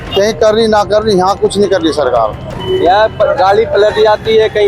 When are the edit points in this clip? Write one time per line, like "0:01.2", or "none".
0:02.4